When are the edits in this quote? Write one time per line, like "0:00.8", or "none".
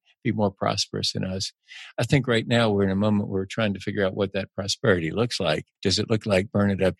0:05.7